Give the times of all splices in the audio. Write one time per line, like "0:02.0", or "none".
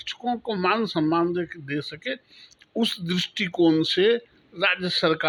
none